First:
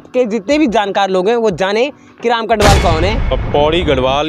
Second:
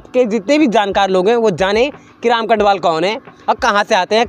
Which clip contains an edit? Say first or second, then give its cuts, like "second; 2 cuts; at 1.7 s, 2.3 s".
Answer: first; 1 cut; at 3.4 s